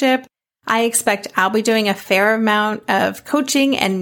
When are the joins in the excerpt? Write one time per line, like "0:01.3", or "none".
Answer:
none